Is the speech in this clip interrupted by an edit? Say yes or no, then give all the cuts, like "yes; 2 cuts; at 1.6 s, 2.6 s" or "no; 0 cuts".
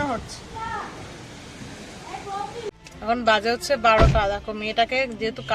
yes; 1 cut; at 2.7 s